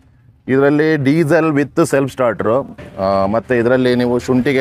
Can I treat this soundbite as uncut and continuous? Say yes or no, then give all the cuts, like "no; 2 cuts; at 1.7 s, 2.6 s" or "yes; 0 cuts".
yes; 0 cuts